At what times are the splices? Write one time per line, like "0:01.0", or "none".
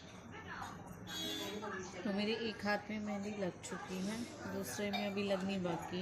none